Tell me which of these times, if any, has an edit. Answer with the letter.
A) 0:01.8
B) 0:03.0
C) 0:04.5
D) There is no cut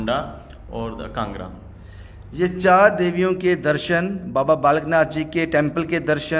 D